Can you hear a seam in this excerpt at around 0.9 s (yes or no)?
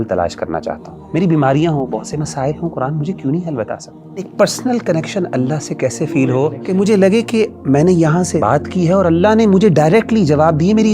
yes